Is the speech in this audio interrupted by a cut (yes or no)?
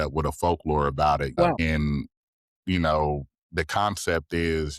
yes